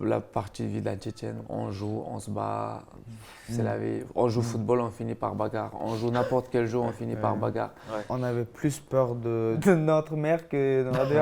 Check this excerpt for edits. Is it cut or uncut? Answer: cut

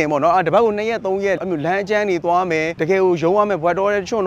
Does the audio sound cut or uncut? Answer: cut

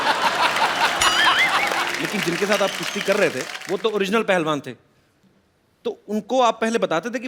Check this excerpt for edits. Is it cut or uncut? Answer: cut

